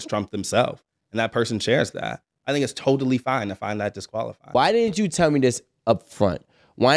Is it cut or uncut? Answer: cut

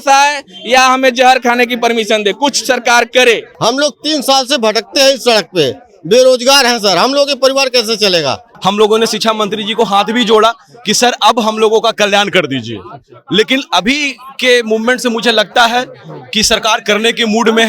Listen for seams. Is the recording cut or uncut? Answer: cut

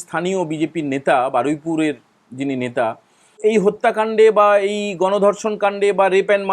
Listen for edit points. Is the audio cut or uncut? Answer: cut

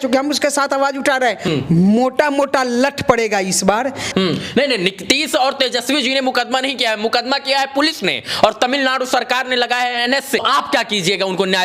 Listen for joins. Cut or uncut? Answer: cut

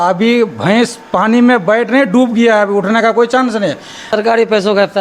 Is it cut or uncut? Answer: cut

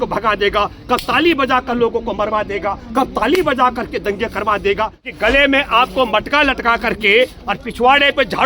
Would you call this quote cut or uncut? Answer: cut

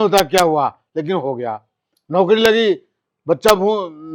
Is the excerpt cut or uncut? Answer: uncut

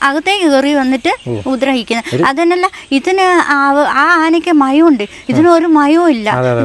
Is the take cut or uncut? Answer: uncut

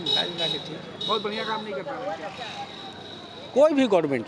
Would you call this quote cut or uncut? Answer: uncut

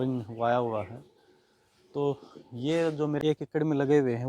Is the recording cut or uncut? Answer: cut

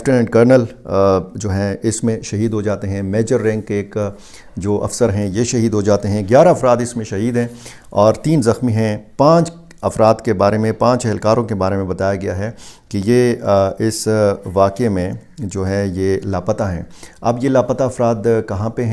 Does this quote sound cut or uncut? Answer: uncut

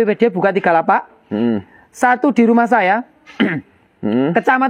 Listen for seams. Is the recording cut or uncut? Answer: uncut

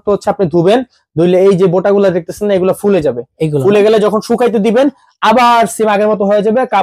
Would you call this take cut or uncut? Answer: uncut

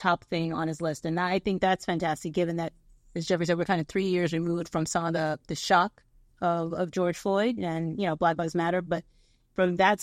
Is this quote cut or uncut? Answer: uncut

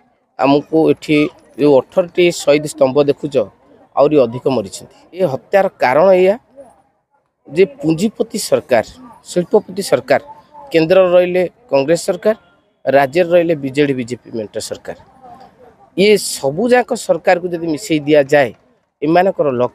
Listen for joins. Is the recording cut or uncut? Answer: cut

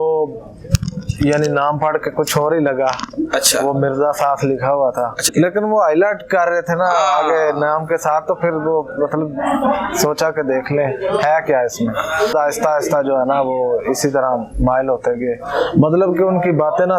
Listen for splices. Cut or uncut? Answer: cut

